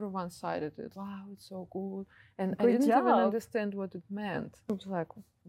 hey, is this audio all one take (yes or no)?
no